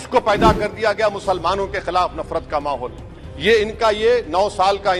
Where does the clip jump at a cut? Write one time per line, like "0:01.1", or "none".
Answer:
none